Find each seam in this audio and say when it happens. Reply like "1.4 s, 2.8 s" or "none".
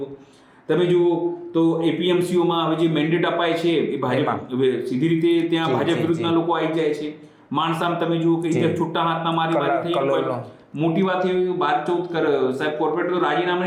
none